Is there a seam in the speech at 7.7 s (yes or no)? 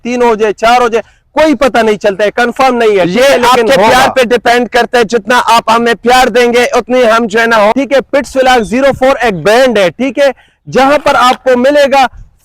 yes